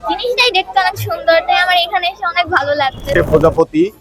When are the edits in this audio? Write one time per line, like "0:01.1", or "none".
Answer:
0:03.1